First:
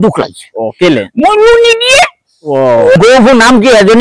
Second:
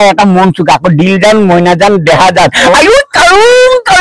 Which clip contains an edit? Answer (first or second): first